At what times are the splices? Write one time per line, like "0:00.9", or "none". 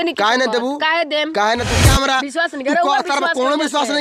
0:01.7